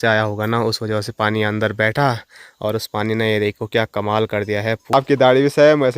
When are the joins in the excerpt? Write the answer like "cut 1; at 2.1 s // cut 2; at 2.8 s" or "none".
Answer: cut 1; at 4.9 s